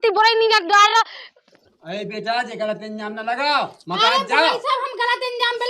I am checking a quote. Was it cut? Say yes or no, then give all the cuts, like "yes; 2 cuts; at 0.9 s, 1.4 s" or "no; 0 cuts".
yes; 1 cut; at 1.5 s